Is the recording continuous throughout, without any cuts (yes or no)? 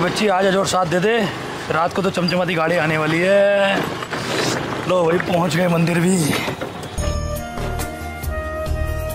yes